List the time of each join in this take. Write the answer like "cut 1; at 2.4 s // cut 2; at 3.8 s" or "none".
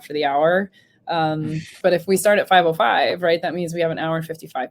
cut 1; at 1.7 s